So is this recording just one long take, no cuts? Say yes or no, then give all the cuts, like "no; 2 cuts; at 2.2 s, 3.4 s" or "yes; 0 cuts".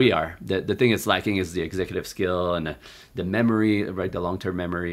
yes; 0 cuts